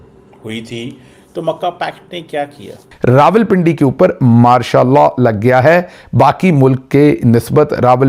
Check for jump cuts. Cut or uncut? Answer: cut